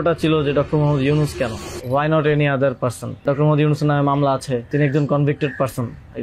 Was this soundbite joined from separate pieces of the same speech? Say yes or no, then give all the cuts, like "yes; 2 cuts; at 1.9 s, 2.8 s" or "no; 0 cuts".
yes; 3 cuts; at 1.7 s, 3.2 s, 4.7 s